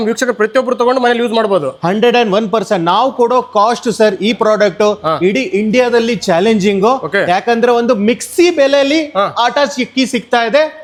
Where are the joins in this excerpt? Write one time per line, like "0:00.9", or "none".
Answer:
none